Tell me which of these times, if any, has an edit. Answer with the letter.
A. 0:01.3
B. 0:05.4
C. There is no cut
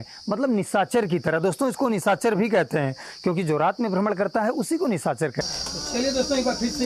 B